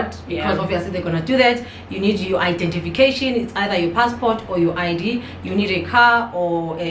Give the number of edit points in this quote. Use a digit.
0